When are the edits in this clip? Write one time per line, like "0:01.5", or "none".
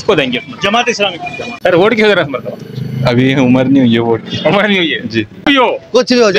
0:01.5
0:05.4